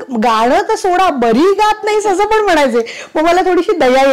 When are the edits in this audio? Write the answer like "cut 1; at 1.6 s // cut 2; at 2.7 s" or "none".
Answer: none